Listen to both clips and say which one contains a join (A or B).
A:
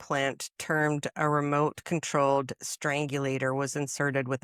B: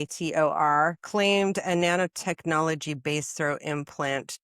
B